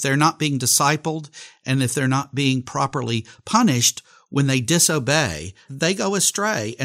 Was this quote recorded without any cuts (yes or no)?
no